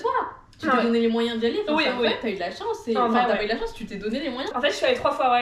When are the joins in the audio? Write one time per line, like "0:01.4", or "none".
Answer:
0:04.5